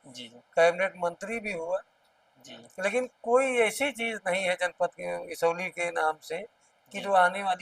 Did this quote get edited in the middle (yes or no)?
no